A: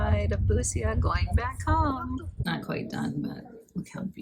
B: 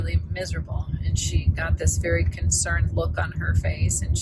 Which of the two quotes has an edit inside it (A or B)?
A